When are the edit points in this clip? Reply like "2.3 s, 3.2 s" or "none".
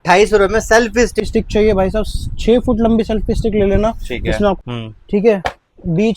1.2 s, 4.7 s